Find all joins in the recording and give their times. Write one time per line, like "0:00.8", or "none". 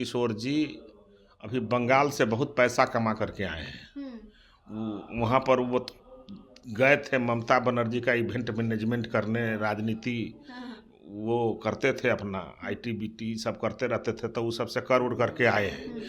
none